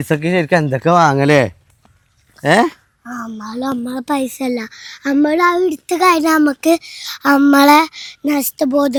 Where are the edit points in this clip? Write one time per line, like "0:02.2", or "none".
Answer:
none